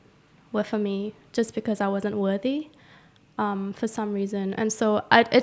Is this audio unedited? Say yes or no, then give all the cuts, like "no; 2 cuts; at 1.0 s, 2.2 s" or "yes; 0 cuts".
yes; 0 cuts